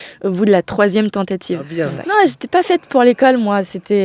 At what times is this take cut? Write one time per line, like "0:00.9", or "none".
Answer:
0:01.8